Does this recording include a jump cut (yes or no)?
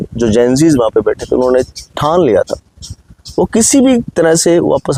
no